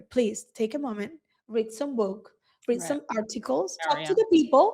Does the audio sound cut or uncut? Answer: cut